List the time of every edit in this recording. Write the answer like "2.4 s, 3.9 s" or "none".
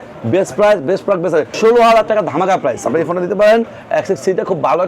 1.5 s